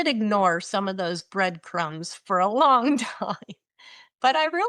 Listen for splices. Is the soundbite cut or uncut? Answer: uncut